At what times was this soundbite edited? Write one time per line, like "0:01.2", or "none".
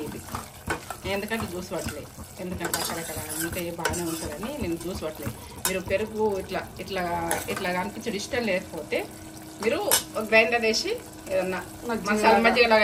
none